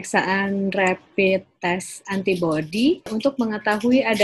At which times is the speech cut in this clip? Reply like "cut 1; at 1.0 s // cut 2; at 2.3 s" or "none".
cut 1; at 3.1 s